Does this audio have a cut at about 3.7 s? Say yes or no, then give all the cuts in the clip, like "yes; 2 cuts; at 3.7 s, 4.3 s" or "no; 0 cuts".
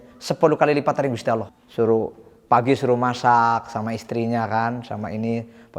no; 1 cut; at 1.6 s